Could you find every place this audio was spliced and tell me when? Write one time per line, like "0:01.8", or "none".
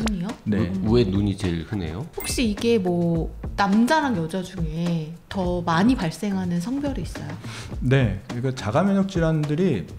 0:02.1